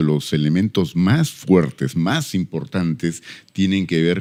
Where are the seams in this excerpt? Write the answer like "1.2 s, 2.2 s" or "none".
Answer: none

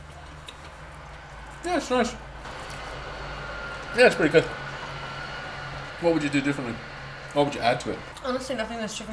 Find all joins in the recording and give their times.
2.4 s, 5.9 s, 8.1 s

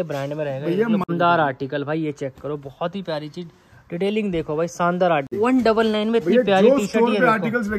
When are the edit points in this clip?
1.1 s, 5.3 s

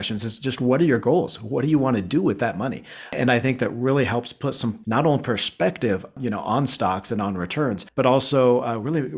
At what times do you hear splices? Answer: 3.1 s, 4.8 s, 6.1 s, 7.8 s

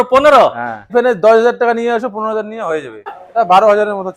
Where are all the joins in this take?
0.9 s, 3.1 s

